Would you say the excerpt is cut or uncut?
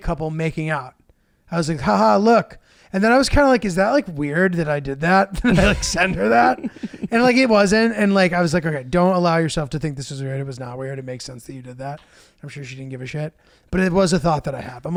uncut